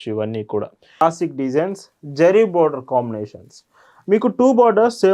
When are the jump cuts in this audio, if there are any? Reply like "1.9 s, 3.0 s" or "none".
1.0 s